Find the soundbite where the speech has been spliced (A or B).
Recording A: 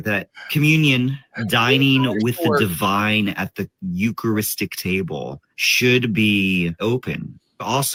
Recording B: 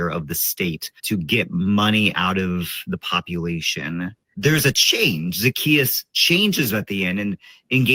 B